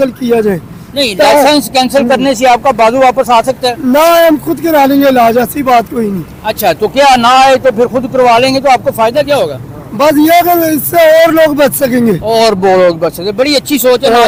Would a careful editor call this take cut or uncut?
uncut